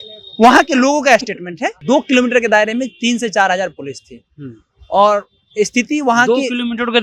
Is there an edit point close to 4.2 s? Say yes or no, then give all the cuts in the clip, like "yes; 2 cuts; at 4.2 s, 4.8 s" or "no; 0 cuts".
no; 1 cut; at 1.8 s